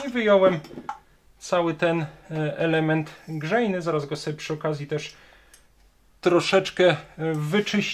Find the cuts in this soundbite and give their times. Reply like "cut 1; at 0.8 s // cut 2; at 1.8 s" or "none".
none